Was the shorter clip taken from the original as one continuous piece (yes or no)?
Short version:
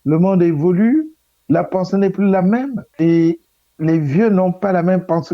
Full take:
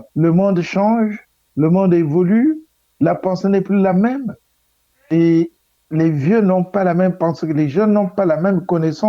no